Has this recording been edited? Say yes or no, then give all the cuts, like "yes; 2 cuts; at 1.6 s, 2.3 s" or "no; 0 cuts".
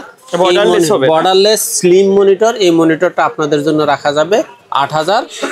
no; 0 cuts